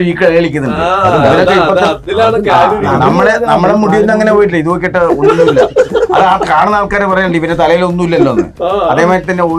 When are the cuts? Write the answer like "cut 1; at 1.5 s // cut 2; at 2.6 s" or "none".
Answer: none